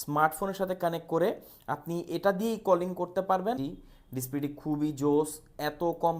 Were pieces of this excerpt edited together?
yes; 1 cut; at 3.6 s

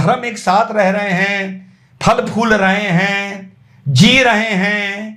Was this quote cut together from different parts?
no; 0 cuts

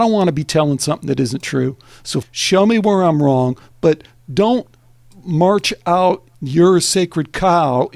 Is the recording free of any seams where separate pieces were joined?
no; 2 cuts; at 2.2 s, 6.3 s

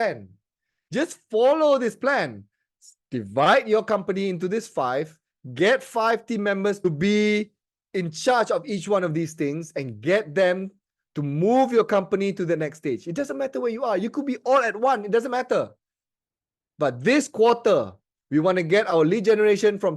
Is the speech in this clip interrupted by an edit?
yes; 1 cut; at 6.8 s

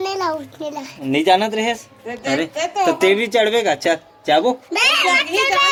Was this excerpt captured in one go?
yes; 0 cuts

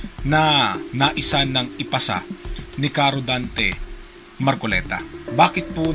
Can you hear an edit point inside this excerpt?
yes; 1 cut; at 4.1 s

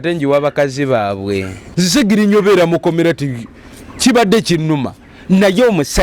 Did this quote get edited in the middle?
yes; 1 cut; at 1.6 s

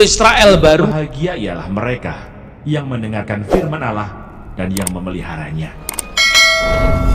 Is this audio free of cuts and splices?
no; 1 cut; at 0.9 s

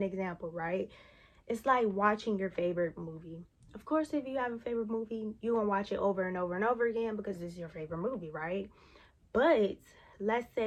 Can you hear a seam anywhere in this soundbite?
no; 0 cuts

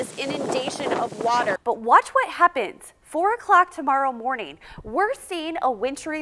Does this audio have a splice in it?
yes; 1 cut; at 1.6 s

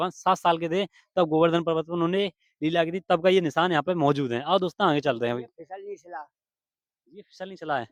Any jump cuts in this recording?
no; 0 cuts

